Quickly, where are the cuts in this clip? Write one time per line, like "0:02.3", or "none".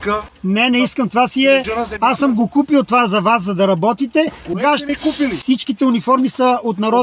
none